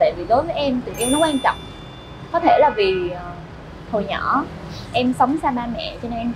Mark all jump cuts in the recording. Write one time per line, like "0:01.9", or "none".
none